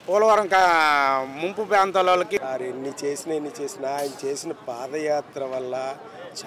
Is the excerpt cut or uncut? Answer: cut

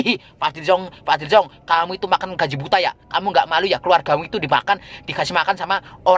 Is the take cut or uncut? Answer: uncut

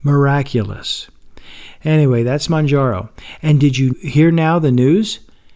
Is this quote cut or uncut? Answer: cut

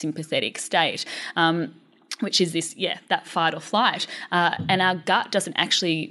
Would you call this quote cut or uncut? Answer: uncut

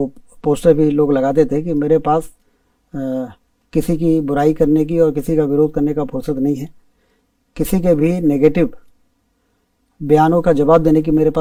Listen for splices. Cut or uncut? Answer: uncut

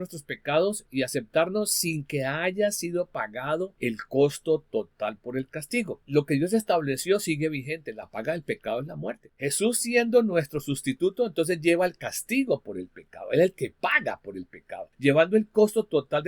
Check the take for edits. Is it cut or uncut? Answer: cut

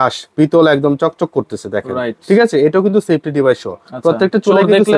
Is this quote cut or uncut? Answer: uncut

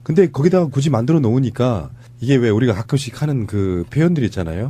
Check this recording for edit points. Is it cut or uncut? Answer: uncut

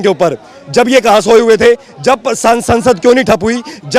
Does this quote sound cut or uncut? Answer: uncut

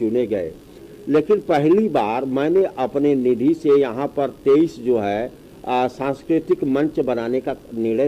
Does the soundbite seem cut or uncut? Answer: uncut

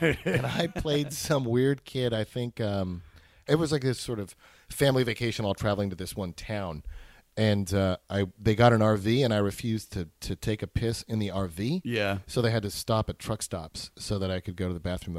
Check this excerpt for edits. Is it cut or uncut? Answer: cut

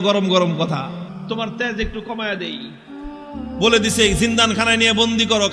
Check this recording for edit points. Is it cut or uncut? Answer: cut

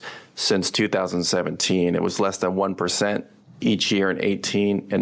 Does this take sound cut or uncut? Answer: uncut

